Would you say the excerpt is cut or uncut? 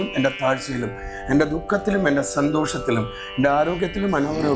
uncut